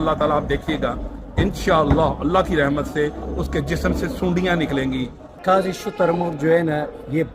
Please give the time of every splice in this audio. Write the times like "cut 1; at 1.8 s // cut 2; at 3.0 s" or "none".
cut 1; at 5.2 s